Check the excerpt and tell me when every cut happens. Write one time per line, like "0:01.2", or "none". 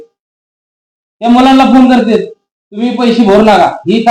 none